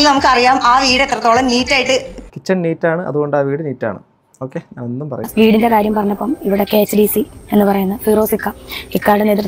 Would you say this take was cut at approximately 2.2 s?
no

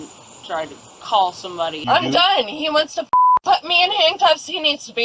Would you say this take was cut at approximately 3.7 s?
no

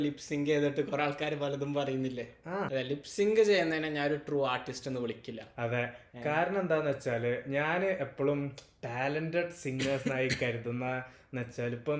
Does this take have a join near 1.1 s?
no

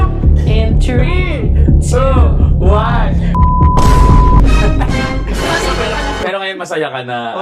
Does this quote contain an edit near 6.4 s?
yes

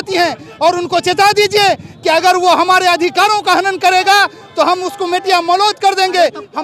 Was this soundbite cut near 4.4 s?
no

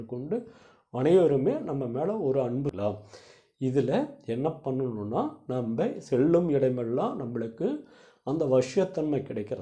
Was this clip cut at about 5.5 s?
no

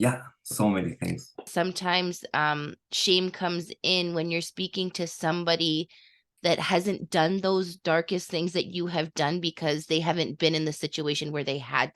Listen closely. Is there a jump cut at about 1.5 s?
yes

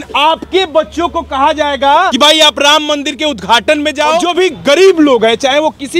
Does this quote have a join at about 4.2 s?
yes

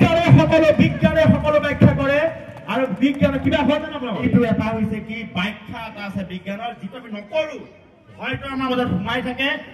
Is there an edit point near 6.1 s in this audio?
no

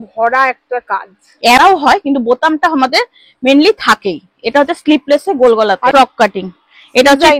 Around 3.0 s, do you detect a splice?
no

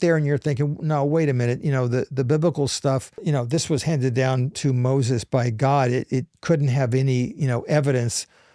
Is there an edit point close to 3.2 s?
yes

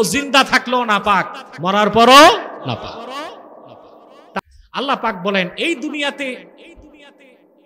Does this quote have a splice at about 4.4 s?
yes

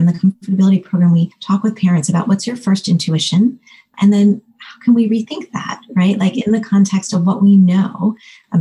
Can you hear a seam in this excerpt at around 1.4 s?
yes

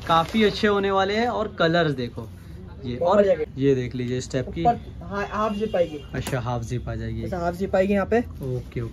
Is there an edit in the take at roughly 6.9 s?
no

